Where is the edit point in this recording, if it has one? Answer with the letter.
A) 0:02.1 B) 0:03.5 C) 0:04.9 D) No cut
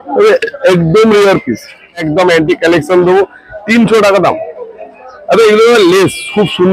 A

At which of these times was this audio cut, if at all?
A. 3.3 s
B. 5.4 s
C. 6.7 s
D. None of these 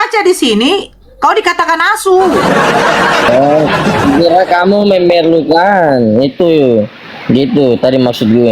A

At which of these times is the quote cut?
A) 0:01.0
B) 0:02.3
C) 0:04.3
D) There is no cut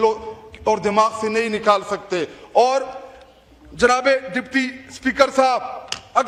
D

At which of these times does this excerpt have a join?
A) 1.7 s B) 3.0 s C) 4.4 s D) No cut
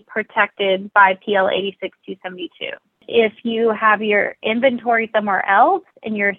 B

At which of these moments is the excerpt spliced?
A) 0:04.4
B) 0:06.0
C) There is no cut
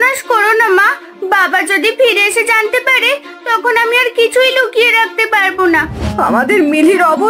B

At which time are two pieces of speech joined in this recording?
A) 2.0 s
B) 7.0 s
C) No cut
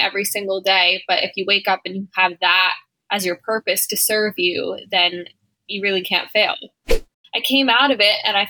B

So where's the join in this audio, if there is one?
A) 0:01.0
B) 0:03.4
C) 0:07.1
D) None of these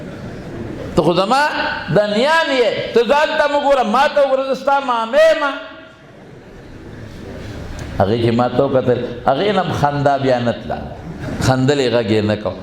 D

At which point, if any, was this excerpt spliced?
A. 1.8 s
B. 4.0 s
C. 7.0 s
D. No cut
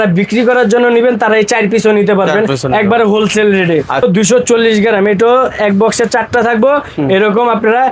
B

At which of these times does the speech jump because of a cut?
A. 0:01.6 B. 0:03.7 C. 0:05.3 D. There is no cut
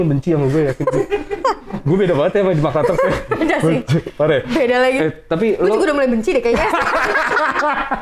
D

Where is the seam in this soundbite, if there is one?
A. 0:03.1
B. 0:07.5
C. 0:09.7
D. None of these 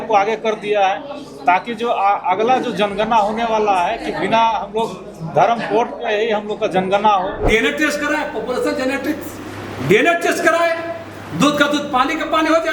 B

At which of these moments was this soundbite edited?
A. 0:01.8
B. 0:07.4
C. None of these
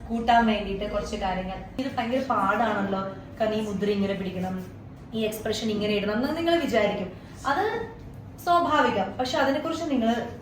A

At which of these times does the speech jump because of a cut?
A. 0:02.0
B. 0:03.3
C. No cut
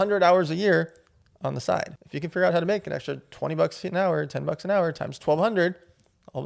A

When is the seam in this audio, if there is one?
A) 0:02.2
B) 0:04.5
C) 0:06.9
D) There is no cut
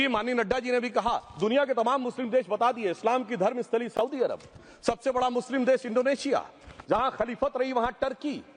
D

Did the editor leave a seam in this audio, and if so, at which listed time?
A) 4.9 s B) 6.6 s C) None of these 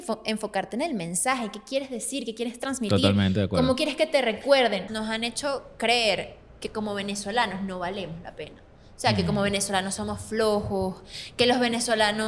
A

